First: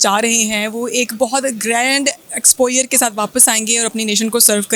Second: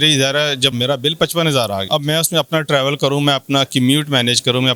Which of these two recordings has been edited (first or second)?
second